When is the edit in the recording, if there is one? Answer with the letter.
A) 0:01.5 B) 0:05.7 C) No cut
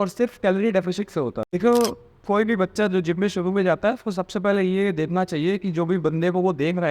A